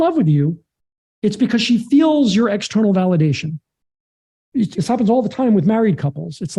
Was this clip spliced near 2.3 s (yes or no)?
no